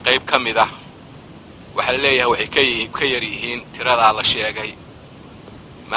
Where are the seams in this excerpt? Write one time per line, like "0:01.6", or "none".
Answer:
none